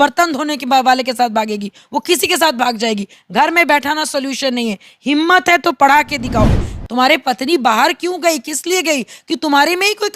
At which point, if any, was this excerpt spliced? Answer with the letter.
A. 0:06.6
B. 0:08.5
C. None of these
A